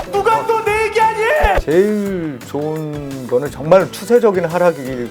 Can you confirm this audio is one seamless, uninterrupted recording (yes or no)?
no